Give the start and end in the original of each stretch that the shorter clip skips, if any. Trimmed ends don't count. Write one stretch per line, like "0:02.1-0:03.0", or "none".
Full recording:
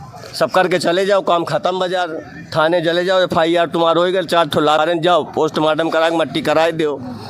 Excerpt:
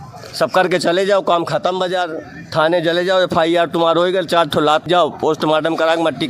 0:04.8-0:05.0